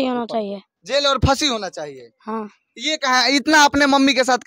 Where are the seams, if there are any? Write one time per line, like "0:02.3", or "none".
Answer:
none